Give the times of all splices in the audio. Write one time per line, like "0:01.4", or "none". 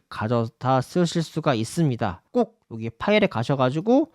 0:02.2